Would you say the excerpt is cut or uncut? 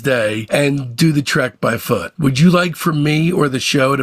cut